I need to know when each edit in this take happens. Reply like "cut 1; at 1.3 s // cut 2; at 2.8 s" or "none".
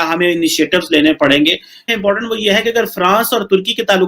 cut 1; at 1.9 s